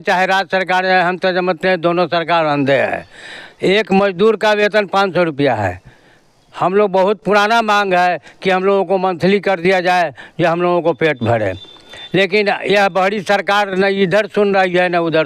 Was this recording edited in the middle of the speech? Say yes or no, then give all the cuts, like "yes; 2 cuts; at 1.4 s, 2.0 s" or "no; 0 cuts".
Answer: no; 0 cuts